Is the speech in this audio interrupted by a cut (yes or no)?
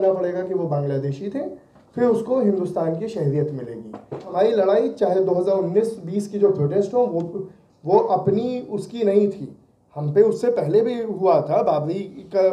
yes